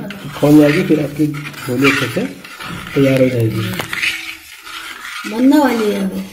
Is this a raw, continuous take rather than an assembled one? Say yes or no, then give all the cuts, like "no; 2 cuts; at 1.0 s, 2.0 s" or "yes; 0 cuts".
yes; 0 cuts